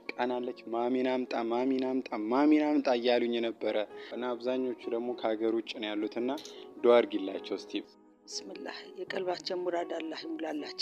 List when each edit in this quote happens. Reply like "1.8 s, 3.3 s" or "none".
4.1 s, 7.9 s